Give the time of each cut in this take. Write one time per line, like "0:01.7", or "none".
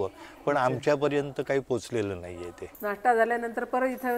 0:02.6